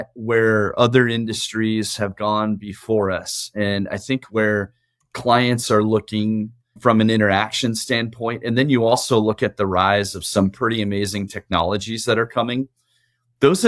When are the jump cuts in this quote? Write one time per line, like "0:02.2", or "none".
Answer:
0:06.8